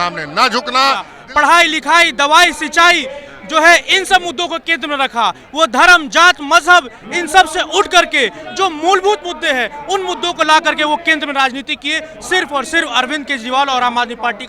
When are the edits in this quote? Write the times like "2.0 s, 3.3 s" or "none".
1.2 s